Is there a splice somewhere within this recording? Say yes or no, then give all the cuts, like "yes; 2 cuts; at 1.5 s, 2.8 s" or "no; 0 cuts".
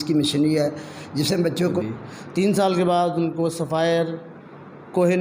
yes; 1 cut; at 1.8 s